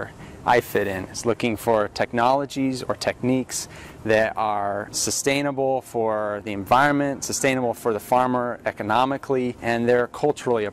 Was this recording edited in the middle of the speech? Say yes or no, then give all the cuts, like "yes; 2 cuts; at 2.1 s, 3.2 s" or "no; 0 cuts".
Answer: yes; 2 cuts; at 4.9 s, 9.6 s